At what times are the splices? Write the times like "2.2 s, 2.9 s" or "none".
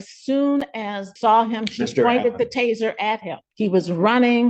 1.1 s, 3.4 s